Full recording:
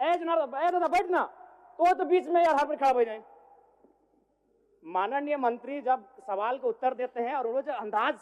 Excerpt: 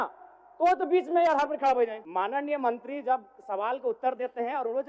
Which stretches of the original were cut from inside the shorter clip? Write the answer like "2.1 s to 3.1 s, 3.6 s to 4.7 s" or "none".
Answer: 3.2 s to 4.8 s